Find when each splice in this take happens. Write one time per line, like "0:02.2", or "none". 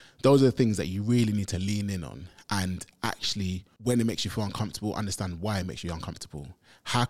0:03.7